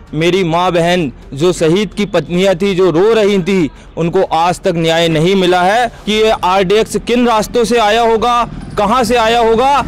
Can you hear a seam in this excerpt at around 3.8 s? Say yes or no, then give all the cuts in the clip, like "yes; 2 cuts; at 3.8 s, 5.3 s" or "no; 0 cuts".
no; 1 cut; at 6.0 s